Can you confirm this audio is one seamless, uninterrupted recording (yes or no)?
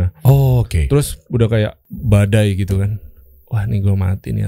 no